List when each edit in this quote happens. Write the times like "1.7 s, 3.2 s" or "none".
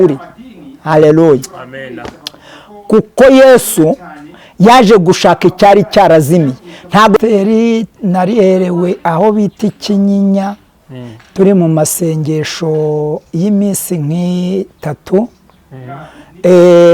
7.2 s

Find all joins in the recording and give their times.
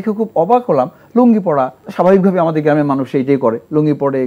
1.8 s

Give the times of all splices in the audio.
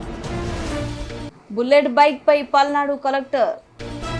1.3 s

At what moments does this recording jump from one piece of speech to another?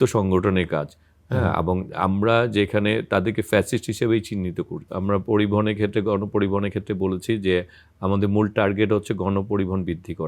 4.9 s

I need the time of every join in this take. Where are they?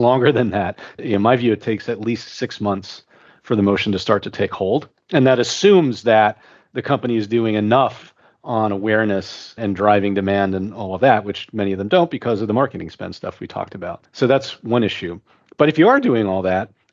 none

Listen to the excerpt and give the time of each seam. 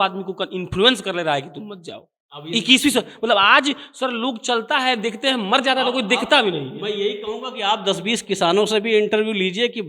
none

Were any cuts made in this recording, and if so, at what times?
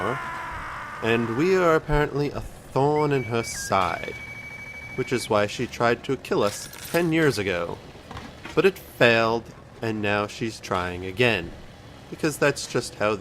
3.6 s

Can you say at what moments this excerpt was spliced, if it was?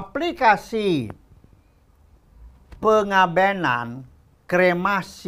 none

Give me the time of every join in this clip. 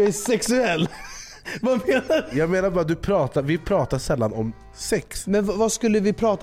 2.3 s, 5.2 s

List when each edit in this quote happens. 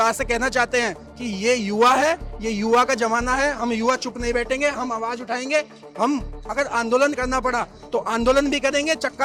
none

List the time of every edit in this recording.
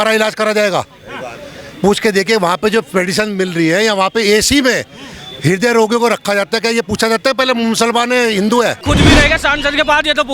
8.8 s

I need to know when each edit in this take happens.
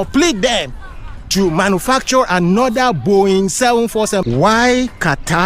4.2 s

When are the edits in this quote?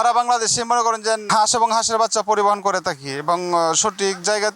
1.3 s

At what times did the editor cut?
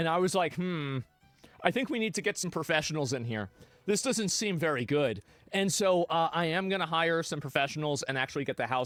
none

